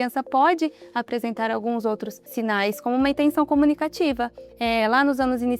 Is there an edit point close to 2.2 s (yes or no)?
yes